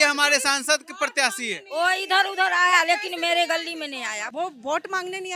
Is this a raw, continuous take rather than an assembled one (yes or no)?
no